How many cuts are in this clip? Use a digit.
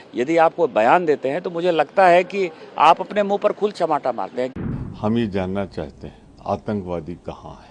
1